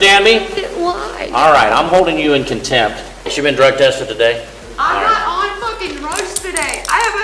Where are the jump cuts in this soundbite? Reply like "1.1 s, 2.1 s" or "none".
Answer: 3.2 s, 4.6 s